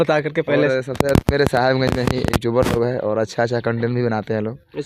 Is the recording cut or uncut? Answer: uncut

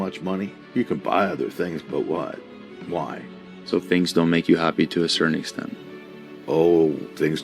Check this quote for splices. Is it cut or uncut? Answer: uncut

